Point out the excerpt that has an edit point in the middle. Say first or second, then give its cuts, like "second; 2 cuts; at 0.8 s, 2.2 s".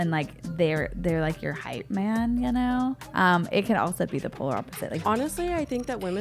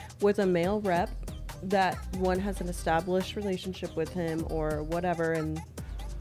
first; 2 cuts; at 3.0 s, 5.0 s